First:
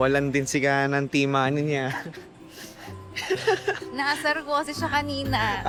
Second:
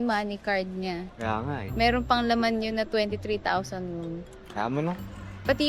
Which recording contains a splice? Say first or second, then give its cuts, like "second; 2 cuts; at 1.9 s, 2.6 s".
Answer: second; 2 cuts; at 1.1 s, 4.4 s